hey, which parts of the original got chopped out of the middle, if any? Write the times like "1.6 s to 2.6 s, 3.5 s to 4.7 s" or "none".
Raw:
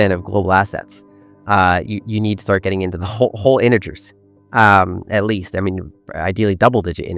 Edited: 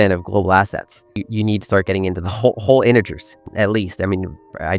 1.2 s to 2.0 s, 4.2 s to 5.0 s